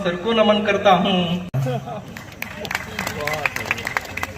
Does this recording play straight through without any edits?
no; 1 cut; at 1.5 s

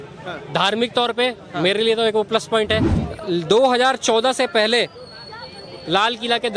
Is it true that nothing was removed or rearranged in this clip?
no; 1 cut; at 3.0 s

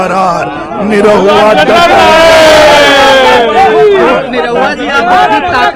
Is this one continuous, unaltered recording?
yes; 0 cuts

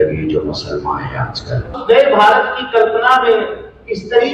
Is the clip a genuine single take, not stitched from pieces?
no; 1 cut; at 1.7 s

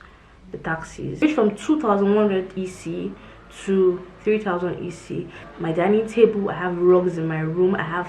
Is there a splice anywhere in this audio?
yes; 2 cuts; at 1.2 s, 5.4 s

